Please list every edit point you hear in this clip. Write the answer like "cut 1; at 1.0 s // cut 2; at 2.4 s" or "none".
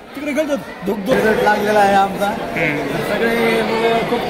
cut 1; at 1.1 s